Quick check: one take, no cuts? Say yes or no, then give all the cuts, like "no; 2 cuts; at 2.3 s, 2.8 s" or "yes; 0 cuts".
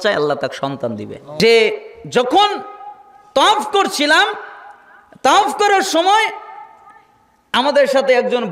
no; 1 cut; at 1.2 s